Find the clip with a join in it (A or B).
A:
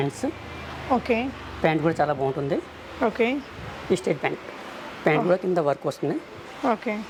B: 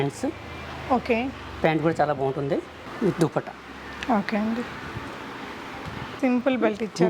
B